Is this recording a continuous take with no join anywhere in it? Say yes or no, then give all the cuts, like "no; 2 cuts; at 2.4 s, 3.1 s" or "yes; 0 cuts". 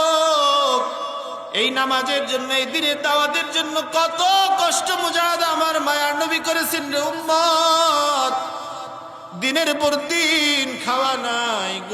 no; 1 cut; at 1.4 s